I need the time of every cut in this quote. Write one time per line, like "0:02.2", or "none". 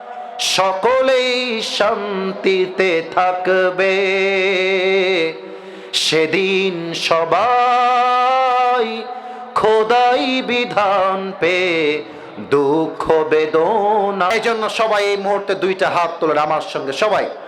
0:14.3